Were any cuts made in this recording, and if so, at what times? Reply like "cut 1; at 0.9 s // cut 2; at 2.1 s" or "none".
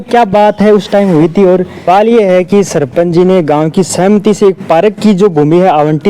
cut 1; at 1.8 s